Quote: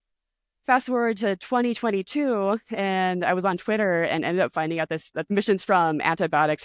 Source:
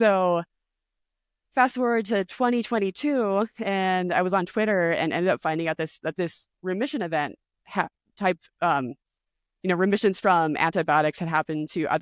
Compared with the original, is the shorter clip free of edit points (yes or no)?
no